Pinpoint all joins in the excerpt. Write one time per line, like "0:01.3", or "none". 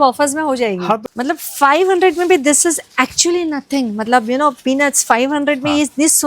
0:01.0